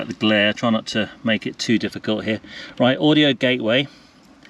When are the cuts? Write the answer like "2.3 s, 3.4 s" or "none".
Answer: none